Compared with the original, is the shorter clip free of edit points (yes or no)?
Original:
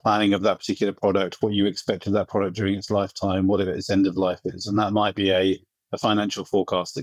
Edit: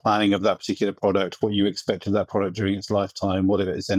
yes